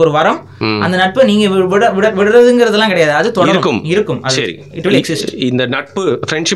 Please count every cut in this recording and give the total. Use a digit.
0